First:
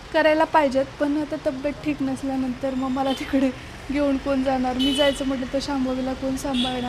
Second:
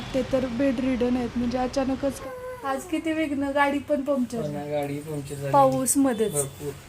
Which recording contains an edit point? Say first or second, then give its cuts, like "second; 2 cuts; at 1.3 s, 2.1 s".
second; 1 cut; at 2.2 s